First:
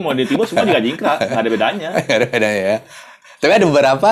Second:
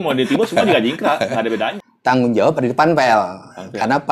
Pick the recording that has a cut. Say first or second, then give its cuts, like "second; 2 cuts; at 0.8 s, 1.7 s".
second; 1 cut; at 1.8 s